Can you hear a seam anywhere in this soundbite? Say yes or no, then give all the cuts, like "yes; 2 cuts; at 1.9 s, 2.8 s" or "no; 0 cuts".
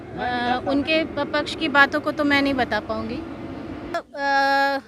yes; 1 cut; at 3.9 s